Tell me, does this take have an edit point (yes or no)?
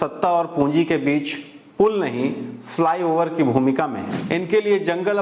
yes